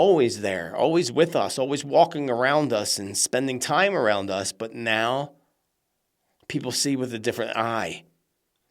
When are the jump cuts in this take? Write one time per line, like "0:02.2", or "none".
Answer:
none